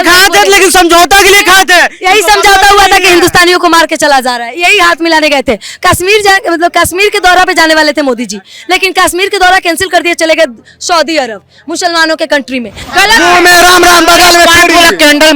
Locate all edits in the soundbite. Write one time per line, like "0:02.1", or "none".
0:12.8